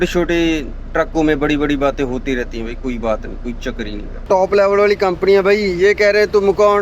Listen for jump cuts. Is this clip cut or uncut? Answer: cut